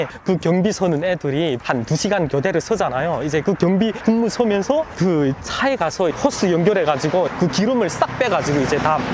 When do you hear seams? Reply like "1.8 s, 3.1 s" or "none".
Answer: 6.1 s, 7.3 s